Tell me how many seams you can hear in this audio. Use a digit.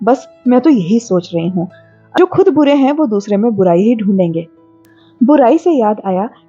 1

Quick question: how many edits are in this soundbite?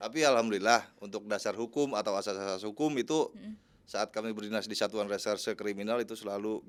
0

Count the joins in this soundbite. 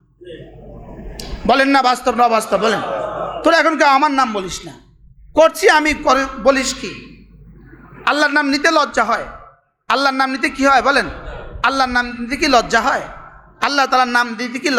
0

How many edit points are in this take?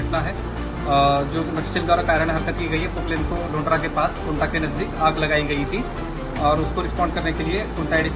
0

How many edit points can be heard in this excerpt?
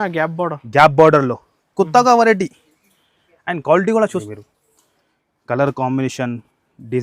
1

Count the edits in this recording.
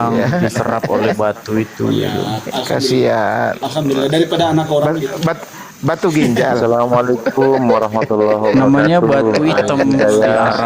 0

